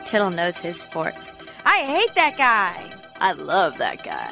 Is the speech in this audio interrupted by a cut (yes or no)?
no